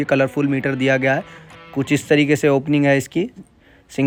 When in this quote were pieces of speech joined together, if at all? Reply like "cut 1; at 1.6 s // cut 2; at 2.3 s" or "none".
none